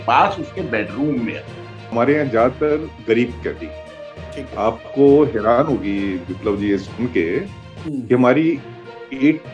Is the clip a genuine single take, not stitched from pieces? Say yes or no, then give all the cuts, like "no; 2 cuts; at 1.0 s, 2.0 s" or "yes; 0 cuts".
no; 1 cut; at 1.9 s